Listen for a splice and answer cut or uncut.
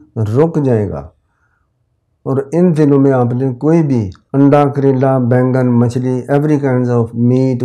uncut